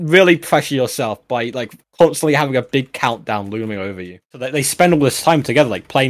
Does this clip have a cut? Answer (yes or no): yes